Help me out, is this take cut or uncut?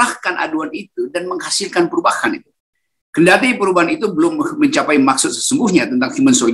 uncut